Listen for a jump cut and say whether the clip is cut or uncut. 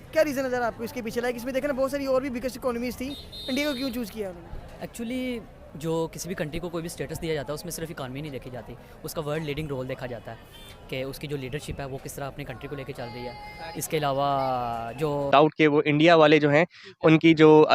cut